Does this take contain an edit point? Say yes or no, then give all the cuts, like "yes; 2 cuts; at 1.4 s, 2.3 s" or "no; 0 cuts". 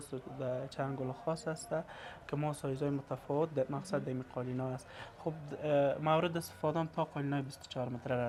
no; 0 cuts